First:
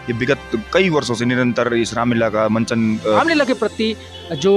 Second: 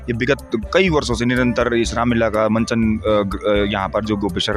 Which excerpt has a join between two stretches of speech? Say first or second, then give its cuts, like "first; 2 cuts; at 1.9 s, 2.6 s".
first; 1 cut; at 3.2 s